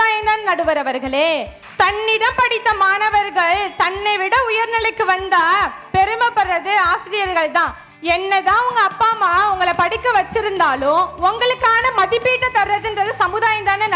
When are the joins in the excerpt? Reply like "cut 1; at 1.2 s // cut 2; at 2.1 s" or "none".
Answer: cut 1; at 1.6 s